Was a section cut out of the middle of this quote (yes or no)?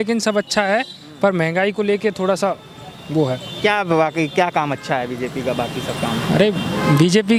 no